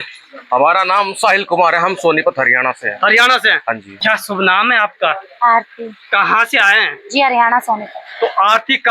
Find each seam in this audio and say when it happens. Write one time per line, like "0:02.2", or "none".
0:03.9